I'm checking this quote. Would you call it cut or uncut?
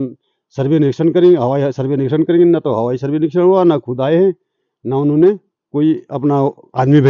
uncut